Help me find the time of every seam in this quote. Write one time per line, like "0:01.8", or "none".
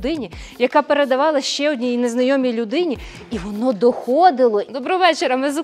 0:04.7